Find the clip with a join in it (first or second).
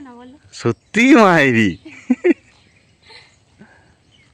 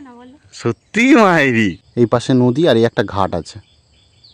second